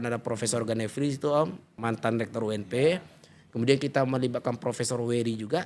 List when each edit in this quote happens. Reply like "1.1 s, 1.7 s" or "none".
1.7 s

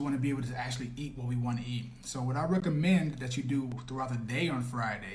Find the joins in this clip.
none

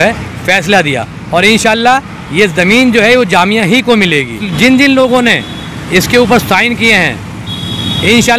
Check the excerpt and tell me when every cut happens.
4.4 s

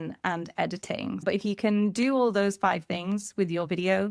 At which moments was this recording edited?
1.2 s

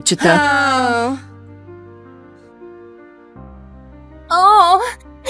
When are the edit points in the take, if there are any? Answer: 1.2 s, 4.3 s

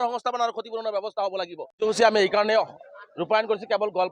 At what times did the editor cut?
1.6 s

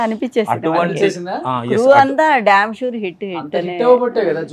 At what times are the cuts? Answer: none

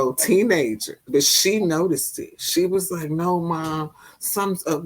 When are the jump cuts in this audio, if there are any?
1.0 s

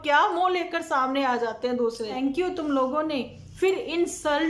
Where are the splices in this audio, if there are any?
2.1 s

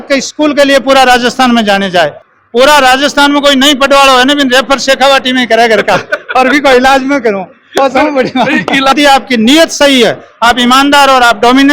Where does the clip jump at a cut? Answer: 2.3 s, 8.9 s

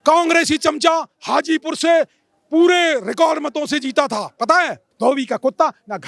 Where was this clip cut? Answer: 4.8 s

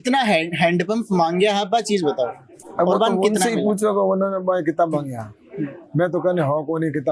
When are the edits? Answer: none

